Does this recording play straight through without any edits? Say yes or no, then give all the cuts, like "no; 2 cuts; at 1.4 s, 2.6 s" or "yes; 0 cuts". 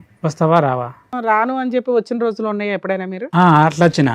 no; 1 cut; at 1.1 s